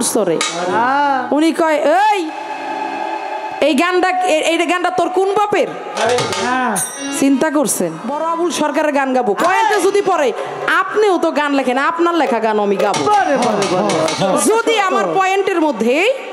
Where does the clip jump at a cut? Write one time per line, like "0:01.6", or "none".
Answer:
0:08.1